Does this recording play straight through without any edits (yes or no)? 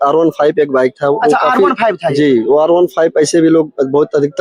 yes